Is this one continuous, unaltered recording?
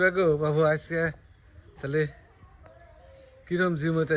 yes; 0 cuts

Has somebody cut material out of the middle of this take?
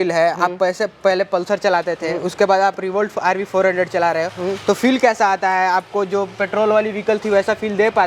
no; 0 cuts

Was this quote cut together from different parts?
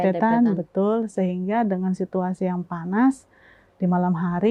no; 0 cuts

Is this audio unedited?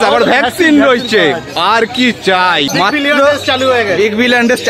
no; 1 cut; at 2.7 s

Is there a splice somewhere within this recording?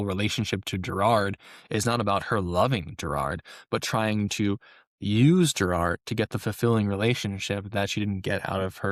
no; 0 cuts

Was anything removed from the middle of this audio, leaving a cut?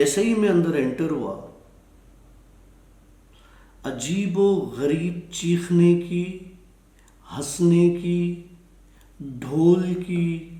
no; 0 cuts

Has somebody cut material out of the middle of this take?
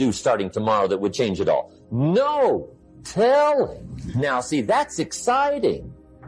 no; 0 cuts

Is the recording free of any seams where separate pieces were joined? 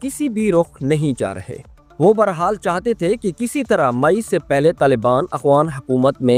yes; 0 cuts

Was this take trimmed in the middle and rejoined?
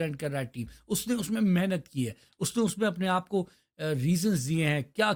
no; 0 cuts

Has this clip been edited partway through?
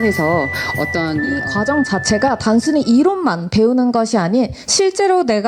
yes; 1 cut; at 1.4 s

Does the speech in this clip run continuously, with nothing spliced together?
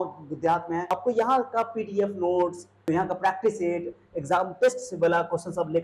no; 2 cuts; at 0.9 s, 2.8 s

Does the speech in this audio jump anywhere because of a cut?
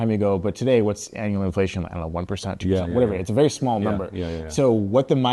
no; 0 cuts

